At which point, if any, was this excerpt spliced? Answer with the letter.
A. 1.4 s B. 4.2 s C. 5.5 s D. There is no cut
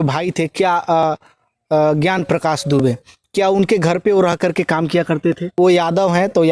C